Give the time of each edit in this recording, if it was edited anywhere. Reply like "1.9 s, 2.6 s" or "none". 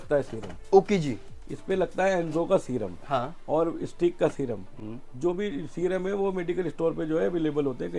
none